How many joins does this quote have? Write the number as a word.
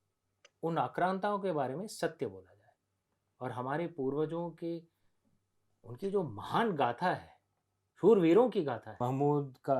one